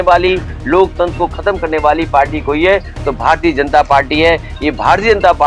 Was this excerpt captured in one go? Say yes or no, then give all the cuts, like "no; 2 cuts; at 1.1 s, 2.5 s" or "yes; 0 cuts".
yes; 0 cuts